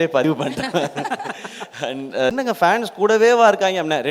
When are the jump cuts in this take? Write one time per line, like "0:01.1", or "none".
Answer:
0:02.3